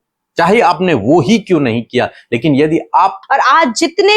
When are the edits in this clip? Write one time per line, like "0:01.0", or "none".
0:03.2